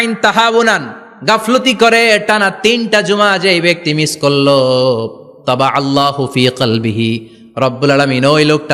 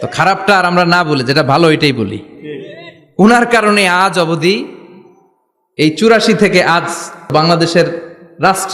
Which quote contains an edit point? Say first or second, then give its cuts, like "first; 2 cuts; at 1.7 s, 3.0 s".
second; 1 cut; at 7.3 s